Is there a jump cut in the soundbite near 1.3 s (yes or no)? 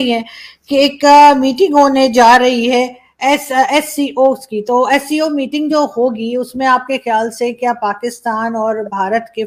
no